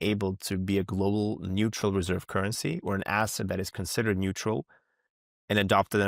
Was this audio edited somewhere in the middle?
no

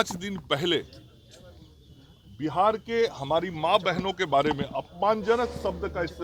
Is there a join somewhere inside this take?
no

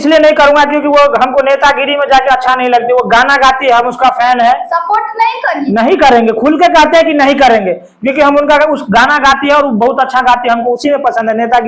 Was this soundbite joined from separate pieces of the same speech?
no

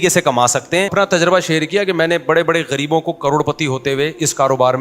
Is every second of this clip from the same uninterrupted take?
no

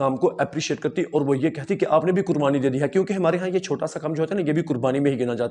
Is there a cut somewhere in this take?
no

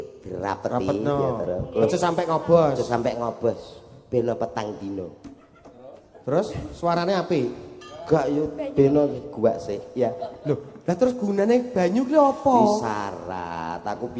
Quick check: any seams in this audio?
no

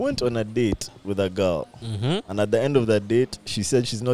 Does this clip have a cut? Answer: no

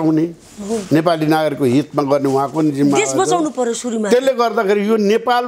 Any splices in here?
no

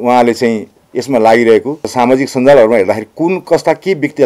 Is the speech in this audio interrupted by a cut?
yes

